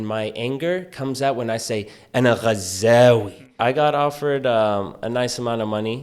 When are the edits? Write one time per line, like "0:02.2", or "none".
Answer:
0:03.6